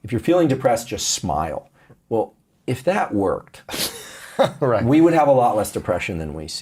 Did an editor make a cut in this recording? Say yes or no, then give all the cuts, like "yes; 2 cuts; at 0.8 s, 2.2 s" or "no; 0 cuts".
no; 0 cuts